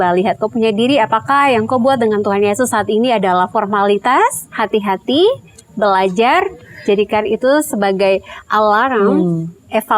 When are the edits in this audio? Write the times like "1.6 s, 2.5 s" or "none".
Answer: 4.4 s